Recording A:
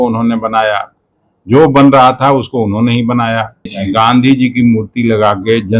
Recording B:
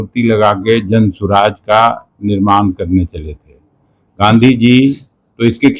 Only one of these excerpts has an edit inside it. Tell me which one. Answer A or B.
A